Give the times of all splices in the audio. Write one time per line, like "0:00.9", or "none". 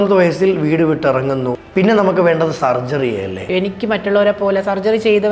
0:01.6
0:03.4